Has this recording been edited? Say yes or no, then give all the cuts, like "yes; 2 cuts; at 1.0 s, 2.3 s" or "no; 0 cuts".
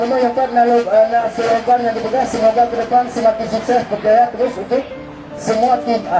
no; 0 cuts